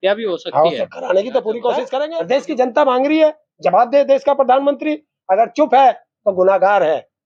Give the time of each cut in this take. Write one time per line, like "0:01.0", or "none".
0:02.0